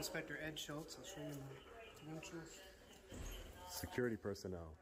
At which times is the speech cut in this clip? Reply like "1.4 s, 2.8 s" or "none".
none